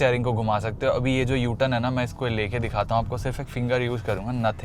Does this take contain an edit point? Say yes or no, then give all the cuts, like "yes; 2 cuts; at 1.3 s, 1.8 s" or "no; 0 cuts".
no; 0 cuts